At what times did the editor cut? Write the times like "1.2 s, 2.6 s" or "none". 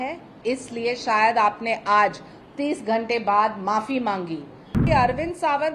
4.8 s